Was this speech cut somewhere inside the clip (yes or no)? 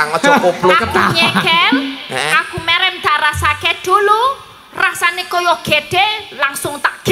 no